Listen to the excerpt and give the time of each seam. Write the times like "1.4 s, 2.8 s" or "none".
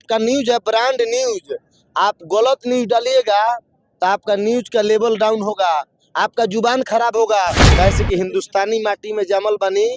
7.6 s